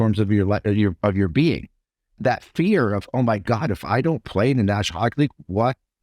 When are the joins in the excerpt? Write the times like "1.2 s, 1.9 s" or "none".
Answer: 2.2 s

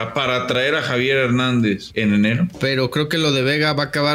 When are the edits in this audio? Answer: 1.9 s, 2.6 s

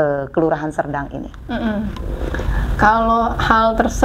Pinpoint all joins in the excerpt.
none

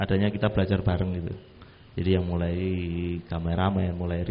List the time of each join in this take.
none

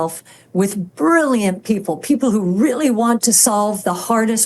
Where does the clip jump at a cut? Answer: none

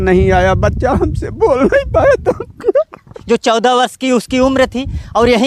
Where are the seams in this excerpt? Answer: 3.1 s

